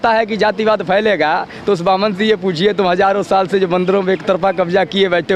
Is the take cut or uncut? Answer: uncut